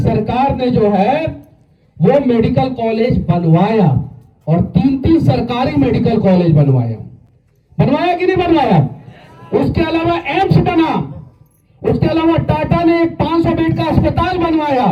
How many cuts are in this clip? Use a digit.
0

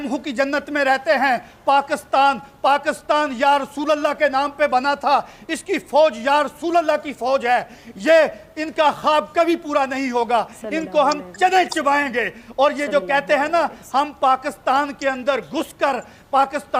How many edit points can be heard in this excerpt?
0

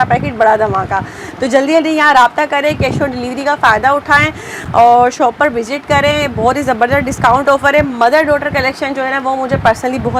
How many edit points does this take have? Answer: 0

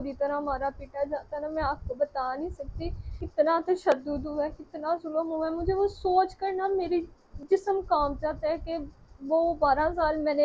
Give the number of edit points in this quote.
2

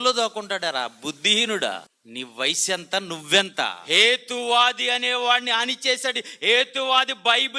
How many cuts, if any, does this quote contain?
2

